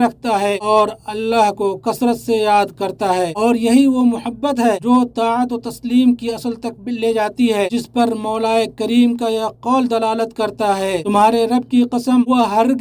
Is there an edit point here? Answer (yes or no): no